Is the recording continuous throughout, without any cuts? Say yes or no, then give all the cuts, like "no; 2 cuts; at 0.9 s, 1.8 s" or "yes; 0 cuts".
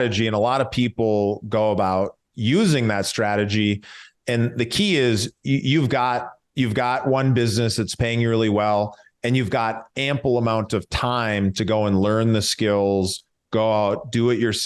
yes; 0 cuts